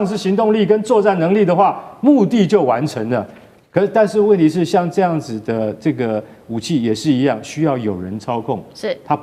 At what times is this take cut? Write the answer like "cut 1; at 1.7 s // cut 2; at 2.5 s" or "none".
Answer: none